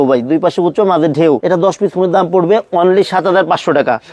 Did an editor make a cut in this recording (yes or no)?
yes